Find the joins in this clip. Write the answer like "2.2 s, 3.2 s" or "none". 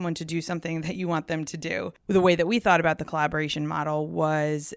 1.9 s

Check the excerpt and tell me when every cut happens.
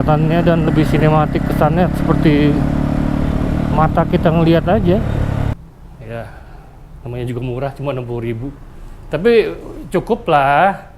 5.5 s

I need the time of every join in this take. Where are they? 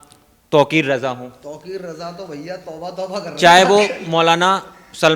none

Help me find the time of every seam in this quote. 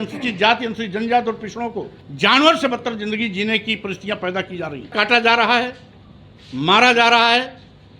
2.0 s, 4.9 s

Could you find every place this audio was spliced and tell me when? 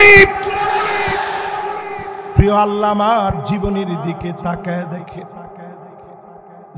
2.1 s

